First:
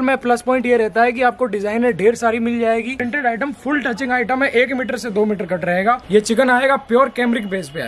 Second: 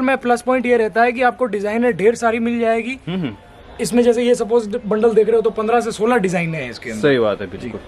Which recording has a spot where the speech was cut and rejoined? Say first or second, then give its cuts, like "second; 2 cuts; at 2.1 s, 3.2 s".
first; 2 cuts; at 3.0 s, 6.0 s